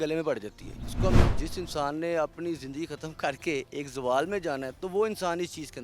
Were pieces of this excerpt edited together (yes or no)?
yes